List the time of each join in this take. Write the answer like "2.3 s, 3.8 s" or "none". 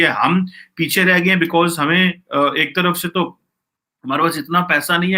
none